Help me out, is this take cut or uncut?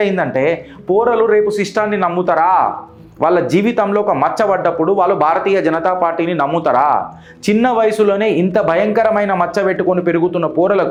uncut